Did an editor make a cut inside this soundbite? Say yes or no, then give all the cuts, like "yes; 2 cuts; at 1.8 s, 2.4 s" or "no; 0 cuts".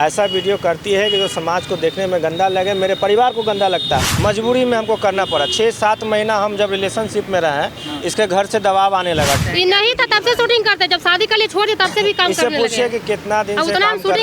yes; 2 cuts; at 4.1 s, 9.4 s